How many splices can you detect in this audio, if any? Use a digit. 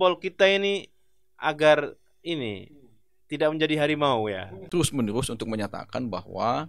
1